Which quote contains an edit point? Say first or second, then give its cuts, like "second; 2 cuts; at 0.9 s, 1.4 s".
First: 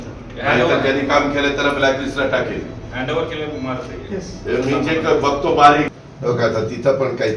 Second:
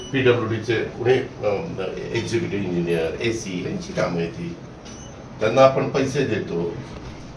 first; 1 cut; at 5.9 s